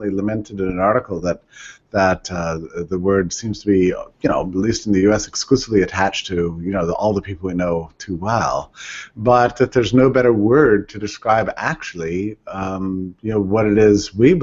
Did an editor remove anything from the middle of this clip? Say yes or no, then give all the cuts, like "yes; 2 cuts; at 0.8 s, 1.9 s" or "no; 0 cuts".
yes; 1 cut; at 12.5 s